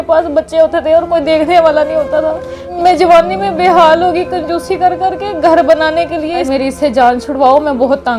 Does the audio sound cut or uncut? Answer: cut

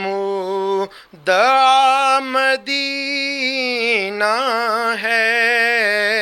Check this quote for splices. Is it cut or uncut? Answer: uncut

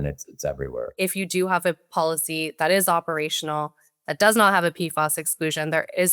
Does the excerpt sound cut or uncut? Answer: cut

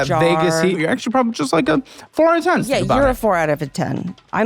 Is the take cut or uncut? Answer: cut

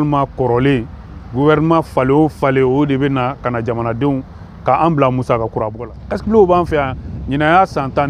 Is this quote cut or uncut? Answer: cut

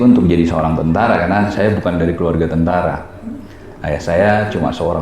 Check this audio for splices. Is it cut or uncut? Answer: uncut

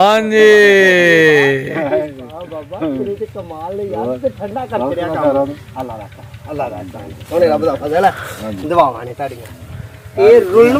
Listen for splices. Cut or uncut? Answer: uncut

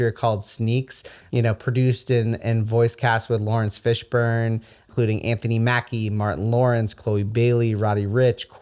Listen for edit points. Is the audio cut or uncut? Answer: cut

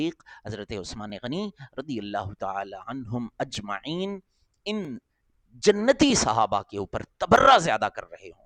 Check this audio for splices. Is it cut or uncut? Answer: uncut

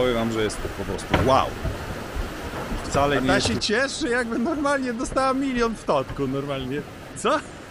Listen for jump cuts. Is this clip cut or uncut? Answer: cut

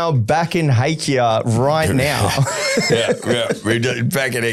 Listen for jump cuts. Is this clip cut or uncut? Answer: uncut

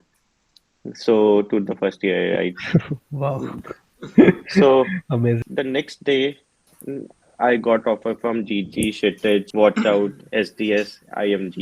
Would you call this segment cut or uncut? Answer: cut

